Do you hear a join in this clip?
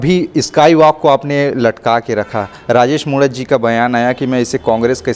no; 0 cuts

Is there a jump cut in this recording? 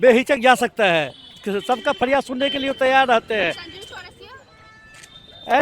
no; 0 cuts

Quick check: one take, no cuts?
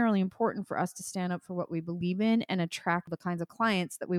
no; 1 cut; at 3.1 s

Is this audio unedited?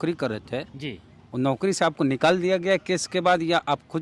yes; 0 cuts

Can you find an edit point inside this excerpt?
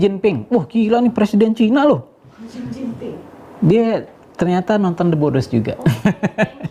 no; 0 cuts

